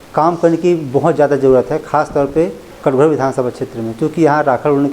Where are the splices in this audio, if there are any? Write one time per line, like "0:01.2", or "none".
none